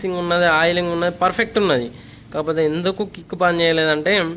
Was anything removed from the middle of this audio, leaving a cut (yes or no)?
no